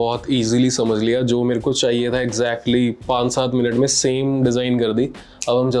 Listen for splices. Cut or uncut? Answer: uncut